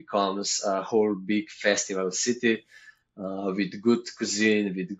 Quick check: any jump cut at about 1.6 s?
no; 0 cuts

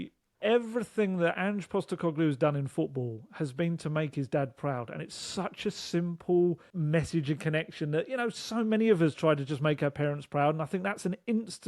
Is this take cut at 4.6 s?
no; 1 cut; at 6.7 s

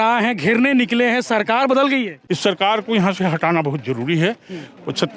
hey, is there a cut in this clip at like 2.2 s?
yes; 1 cut; at 2.2 s

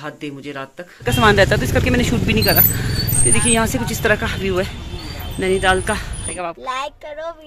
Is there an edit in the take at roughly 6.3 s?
yes; 2 cuts; at 1.1 s, 6.3 s

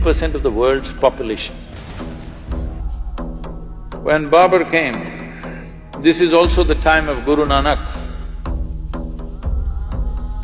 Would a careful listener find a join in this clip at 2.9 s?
yes; 1 cut; at 2.9 s

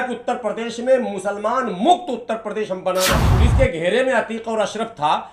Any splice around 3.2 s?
yes; 1 cut; at 3.2 s

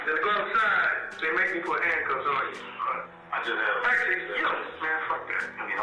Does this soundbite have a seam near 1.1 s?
no; 1 cut; at 2.7 s

